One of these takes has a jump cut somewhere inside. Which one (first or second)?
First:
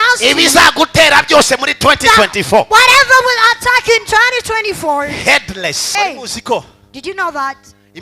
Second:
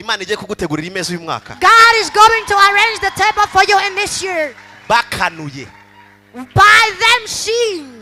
first